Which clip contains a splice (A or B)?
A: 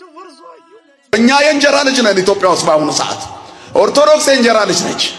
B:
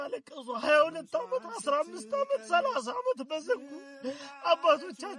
A